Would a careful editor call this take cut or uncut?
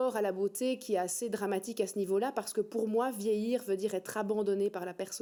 uncut